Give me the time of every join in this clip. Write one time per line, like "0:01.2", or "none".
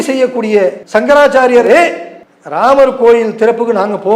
0:00.8
0:01.7